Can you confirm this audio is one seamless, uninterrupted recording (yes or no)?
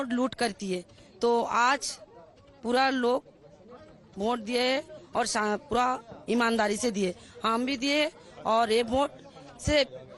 no